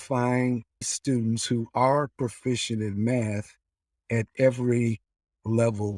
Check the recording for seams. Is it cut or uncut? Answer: cut